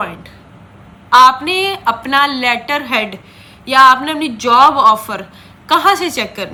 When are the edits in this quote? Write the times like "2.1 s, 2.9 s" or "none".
none